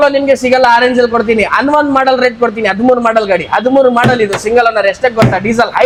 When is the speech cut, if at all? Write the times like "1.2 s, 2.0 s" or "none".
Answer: none